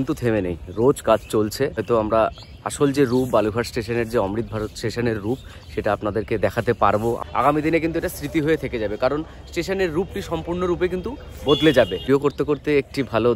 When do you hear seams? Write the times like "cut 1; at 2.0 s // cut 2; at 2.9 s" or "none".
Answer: cut 1; at 1.8 s // cut 2; at 7.2 s // cut 3; at 11.9 s